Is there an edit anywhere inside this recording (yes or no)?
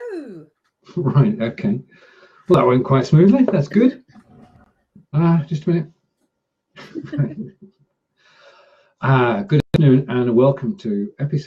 no